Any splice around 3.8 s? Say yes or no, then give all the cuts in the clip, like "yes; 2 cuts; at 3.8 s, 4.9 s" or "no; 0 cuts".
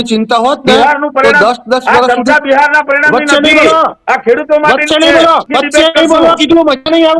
no; 1 cut; at 5.5 s